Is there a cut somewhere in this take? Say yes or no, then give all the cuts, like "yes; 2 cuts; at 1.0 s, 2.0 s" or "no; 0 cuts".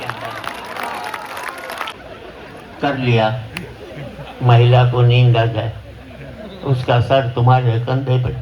yes; 1 cut; at 1.9 s